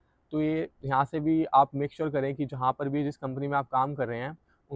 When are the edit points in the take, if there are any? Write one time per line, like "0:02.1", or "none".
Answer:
none